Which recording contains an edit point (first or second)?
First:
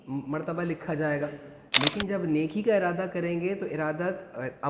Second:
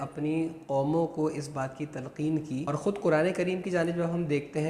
second